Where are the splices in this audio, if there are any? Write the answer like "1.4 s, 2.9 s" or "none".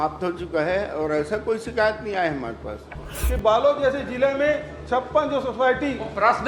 3.1 s